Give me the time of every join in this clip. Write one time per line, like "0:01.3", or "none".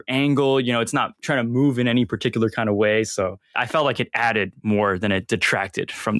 none